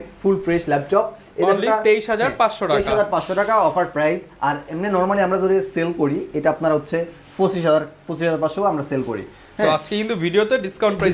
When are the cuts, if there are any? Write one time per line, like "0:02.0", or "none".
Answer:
none